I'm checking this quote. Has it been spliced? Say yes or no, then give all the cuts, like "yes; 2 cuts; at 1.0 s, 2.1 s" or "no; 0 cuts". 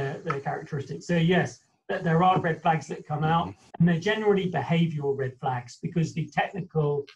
yes; 1 cut; at 3.7 s